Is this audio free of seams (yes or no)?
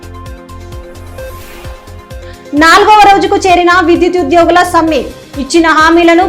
no